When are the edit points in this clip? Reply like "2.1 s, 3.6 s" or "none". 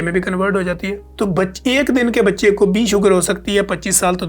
1.0 s